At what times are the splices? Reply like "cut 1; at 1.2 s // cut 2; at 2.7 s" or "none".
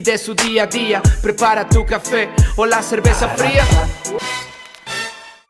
cut 1; at 4.2 s

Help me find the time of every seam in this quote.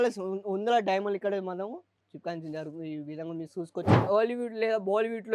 cut 1; at 4.0 s

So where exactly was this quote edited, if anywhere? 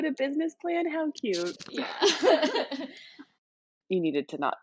cut 1; at 3.7 s

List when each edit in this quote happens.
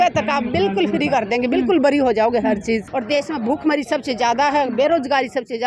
cut 1; at 2.8 s

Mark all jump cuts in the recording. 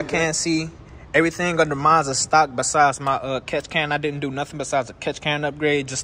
none

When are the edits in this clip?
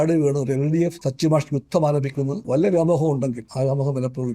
cut 1; at 1.0 s // cut 2; at 2.4 s // cut 3; at 3.4 s

